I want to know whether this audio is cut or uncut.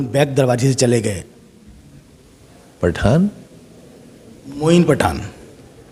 uncut